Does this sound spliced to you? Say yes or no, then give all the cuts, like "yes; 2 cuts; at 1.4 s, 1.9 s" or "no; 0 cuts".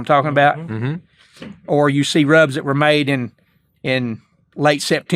no; 0 cuts